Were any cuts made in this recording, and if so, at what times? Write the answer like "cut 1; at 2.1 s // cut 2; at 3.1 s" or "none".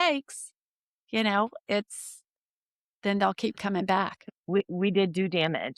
cut 1; at 4.3 s